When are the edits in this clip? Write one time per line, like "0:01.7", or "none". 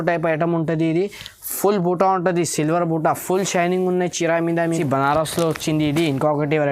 0:04.7